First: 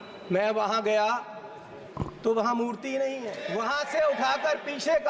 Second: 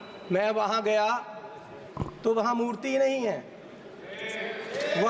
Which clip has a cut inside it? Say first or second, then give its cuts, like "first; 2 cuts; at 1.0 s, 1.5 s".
first; 1 cut; at 3.3 s